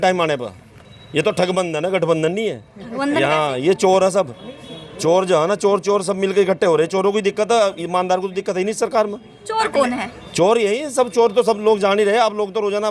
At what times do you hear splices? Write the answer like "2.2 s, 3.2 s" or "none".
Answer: none